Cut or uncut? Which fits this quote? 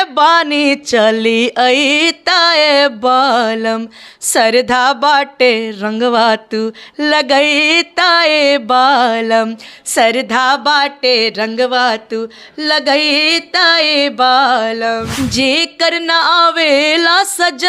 cut